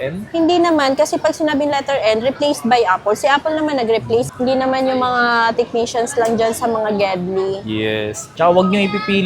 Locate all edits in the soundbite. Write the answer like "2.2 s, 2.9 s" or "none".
8.2 s